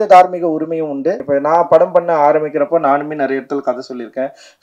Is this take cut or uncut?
cut